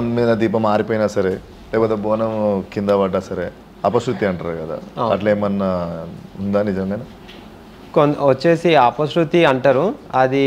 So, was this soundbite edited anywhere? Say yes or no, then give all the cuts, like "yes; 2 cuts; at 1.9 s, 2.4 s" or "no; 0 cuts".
no; 0 cuts